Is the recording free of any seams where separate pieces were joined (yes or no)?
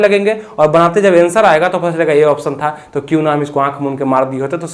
yes